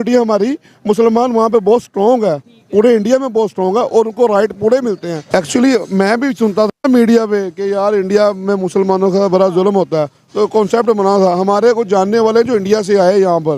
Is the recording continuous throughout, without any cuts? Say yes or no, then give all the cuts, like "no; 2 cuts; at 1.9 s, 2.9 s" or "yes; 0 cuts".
no; 1 cut; at 5.1 s